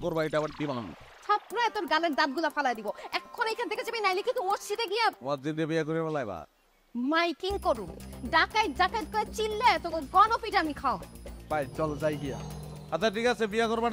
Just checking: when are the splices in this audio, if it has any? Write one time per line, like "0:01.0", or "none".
none